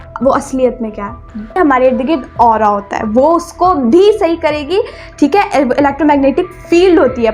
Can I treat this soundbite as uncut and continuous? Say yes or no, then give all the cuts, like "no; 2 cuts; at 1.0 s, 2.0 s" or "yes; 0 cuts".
no; 1 cut; at 1.6 s